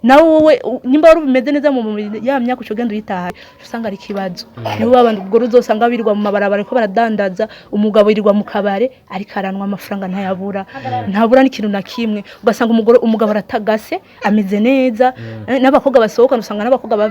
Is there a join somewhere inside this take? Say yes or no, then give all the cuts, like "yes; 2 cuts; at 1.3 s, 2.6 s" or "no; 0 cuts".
yes; 1 cut; at 3.3 s